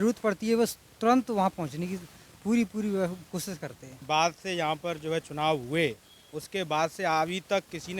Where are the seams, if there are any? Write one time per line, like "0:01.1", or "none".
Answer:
0:04.0